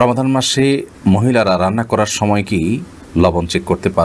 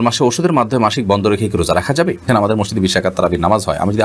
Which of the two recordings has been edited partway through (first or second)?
second